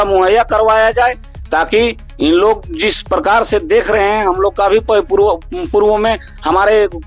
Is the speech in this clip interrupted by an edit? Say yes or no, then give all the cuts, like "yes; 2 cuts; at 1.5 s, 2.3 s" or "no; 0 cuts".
no; 0 cuts